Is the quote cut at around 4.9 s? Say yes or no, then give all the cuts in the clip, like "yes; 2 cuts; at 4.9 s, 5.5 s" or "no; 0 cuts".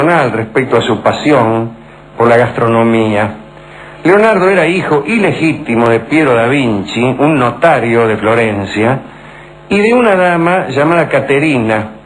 yes; 1 cut; at 4.9 s